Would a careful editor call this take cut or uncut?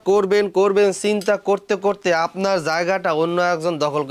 uncut